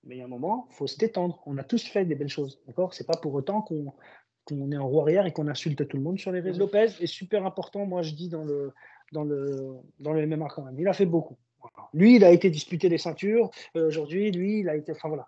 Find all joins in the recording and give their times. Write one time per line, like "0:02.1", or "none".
0:06.6